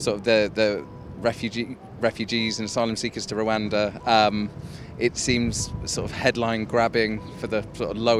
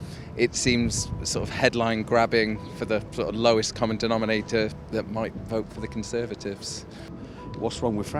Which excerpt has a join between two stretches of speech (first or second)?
second